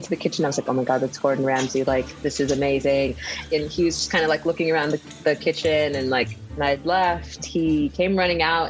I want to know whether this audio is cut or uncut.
cut